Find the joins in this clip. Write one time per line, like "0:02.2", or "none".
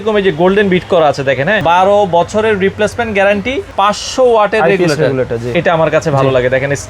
0:01.6
0:03.6
0:05.4